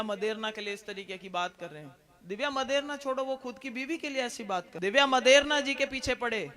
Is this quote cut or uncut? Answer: cut